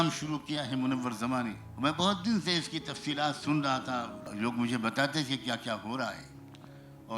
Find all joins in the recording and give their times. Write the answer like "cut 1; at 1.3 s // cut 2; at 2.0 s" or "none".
cut 1; at 1.6 s // cut 2; at 4.2 s

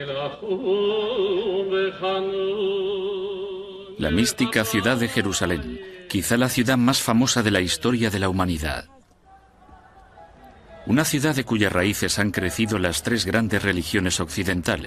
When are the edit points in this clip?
none

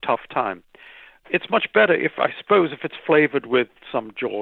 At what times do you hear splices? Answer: cut 1; at 1.2 s

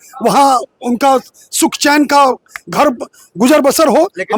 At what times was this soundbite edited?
none

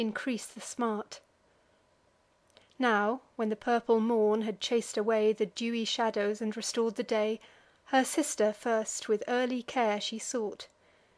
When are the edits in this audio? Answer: cut 1; at 5.4 s

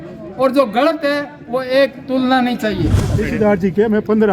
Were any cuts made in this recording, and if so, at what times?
cut 1; at 3.2 s

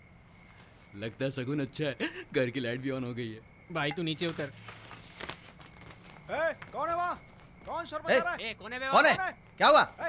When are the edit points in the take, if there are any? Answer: none

